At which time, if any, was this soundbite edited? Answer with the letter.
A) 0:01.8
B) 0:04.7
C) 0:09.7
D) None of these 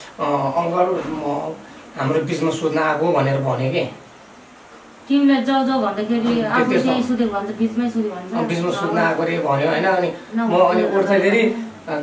D